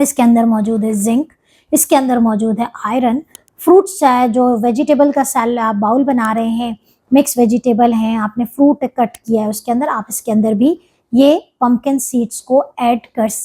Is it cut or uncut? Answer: cut